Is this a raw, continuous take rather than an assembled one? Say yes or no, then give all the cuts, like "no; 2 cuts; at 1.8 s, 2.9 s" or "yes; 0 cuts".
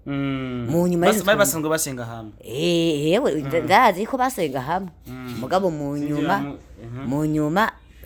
yes; 0 cuts